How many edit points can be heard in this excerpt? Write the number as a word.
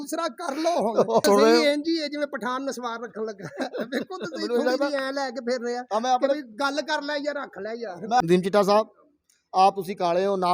two